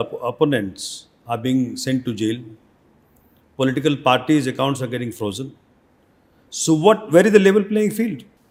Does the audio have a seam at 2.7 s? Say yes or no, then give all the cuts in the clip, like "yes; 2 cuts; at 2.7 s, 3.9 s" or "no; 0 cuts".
no; 0 cuts